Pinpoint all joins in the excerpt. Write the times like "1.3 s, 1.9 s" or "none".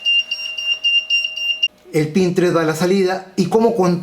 1.7 s